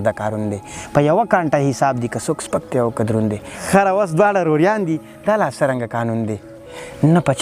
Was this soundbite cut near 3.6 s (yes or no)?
yes